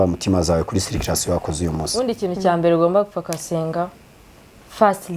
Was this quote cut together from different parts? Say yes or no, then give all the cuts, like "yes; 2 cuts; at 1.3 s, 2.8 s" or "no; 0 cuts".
yes; 1 cut; at 1.9 s